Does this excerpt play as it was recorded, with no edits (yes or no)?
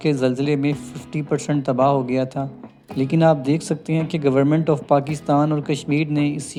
yes